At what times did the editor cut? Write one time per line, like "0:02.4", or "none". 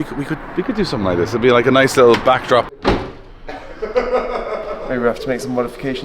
0:02.7
0:04.8